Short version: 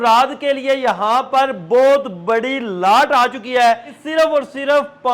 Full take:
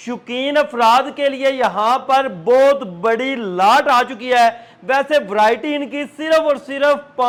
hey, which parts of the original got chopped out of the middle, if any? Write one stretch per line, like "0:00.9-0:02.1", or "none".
0:04.7-0:06.1